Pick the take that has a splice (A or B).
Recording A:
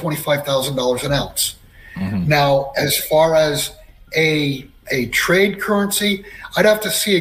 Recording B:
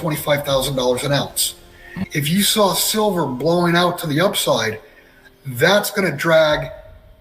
B